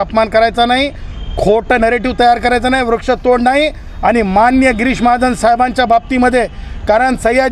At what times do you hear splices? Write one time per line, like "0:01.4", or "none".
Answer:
none